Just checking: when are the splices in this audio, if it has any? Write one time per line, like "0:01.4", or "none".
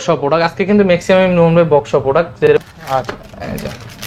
0:02.5